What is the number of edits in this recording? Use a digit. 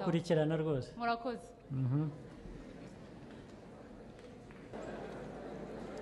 1